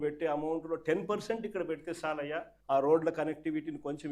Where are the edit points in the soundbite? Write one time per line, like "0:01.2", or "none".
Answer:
0:02.5